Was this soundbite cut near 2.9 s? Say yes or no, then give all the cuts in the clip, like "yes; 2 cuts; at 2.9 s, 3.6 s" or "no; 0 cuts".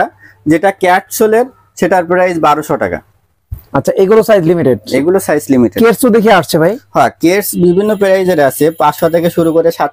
no; 0 cuts